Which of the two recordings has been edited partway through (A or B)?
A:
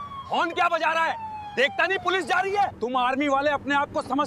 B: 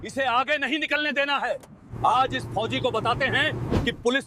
A